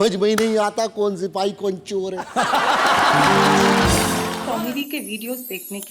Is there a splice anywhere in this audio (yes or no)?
yes